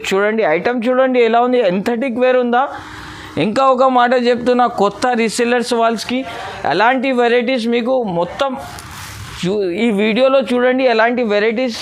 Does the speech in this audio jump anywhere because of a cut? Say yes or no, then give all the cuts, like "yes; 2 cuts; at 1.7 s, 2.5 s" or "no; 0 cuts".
no; 0 cuts